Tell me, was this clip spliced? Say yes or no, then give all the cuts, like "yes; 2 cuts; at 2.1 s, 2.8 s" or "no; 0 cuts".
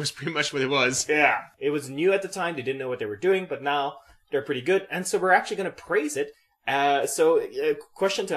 yes; 1 cut; at 3.6 s